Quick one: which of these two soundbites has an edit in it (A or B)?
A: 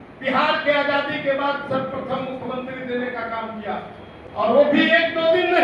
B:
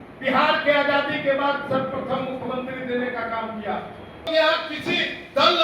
B